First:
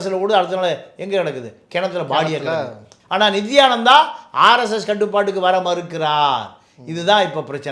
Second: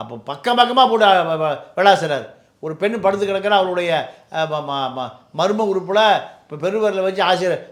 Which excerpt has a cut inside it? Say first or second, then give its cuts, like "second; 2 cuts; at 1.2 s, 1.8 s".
first; 1 cut; at 2.9 s